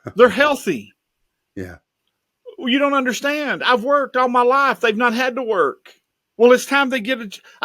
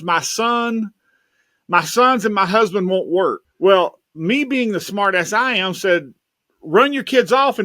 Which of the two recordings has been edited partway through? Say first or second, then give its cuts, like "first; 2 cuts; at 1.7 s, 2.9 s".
second; 1 cut; at 3.5 s